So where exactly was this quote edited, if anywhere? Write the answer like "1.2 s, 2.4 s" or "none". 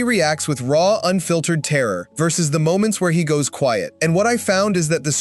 2.1 s, 3.9 s